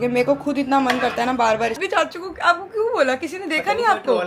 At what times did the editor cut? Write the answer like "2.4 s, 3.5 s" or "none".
1.9 s